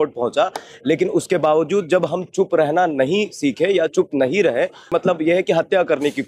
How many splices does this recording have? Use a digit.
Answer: 1